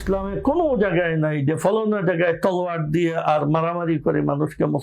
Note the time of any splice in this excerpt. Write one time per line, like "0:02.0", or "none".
none